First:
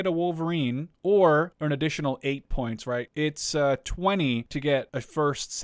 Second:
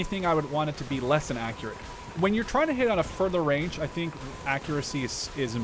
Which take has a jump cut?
first; 4 cuts; at 0.9 s, 1.5 s, 3.1 s, 4.7 s

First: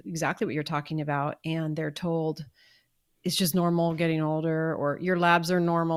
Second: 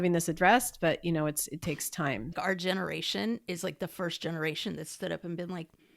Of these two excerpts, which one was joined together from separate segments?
second; 1 cut; at 2.3 s

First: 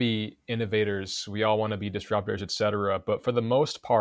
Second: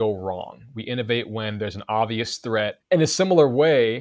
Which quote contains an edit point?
second; 1 cut; at 2.8 s

